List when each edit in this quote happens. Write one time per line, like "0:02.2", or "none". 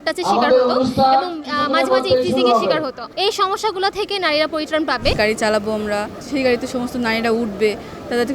0:03.0
0:05.1
0:06.2